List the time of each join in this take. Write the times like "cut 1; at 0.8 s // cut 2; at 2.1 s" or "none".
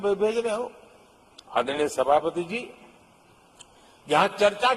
none